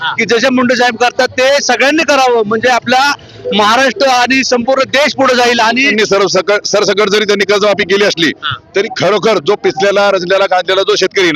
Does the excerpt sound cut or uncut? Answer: cut